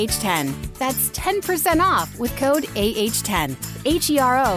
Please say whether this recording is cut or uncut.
uncut